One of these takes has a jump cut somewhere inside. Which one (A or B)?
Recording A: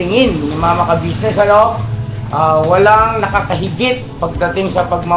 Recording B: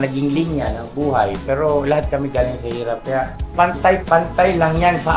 B